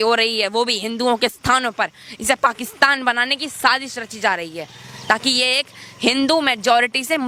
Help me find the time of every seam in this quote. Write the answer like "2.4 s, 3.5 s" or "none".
none